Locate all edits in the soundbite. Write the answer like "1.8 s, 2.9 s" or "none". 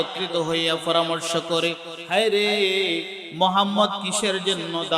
1.9 s, 3.2 s